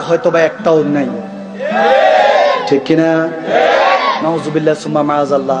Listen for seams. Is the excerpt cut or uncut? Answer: cut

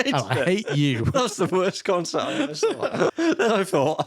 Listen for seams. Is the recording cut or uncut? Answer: cut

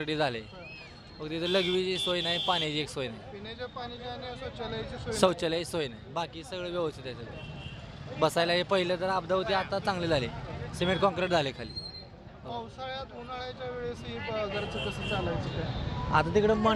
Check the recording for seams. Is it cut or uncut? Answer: uncut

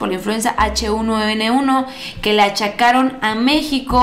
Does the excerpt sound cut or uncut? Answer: uncut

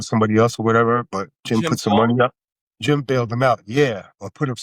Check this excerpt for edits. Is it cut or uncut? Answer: cut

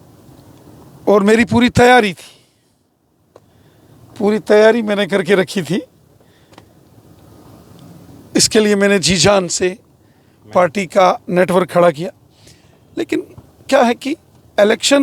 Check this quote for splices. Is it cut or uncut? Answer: uncut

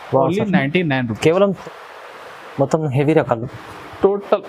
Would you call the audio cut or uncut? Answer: cut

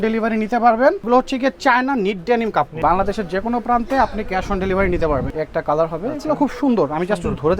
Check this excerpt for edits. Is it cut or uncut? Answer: cut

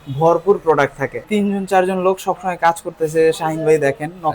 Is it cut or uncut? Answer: cut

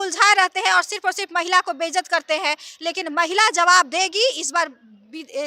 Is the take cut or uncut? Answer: uncut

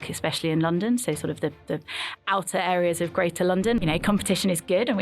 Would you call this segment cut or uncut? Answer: cut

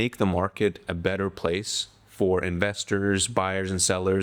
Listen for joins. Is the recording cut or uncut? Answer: uncut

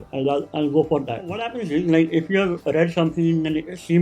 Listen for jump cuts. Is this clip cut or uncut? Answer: cut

